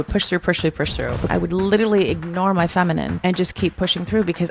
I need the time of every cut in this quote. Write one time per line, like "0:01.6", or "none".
0:01.3
0:03.1